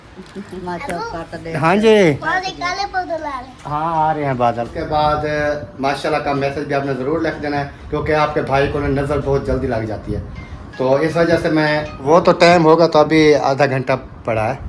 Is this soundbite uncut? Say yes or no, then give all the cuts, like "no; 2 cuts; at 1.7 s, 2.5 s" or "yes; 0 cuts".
no; 2 cuts; at 4.8 s, 11.9 s